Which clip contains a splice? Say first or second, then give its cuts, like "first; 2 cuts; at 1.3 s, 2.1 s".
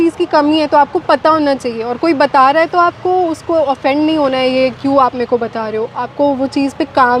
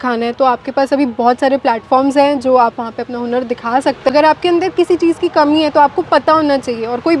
second; 1 cut; at 4.1 s